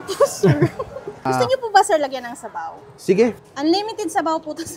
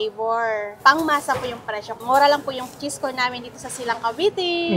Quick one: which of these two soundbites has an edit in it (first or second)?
first